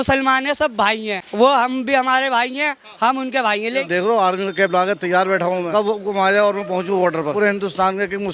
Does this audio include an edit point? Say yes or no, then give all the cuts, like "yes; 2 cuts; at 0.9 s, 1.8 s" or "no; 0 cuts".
yes; 4 cuts; at 1.2 s, 3.7 s, 5.7 s, 7.3 s